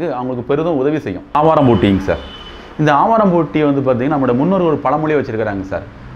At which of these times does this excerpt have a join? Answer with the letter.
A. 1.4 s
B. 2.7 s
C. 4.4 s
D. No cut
A